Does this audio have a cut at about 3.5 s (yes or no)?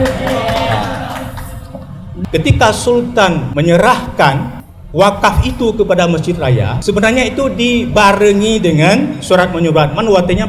yes